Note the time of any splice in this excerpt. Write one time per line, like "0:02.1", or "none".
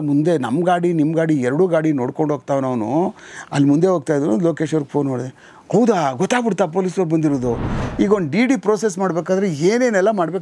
0:07.7